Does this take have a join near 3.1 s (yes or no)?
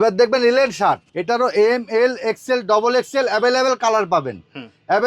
no